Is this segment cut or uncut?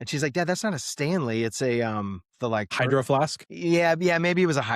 cut